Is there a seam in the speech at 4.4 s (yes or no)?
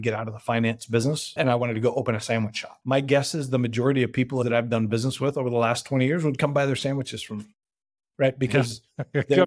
yes